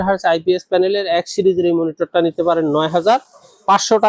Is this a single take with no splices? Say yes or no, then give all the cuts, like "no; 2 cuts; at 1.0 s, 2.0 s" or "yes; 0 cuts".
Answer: yes; 0 cuts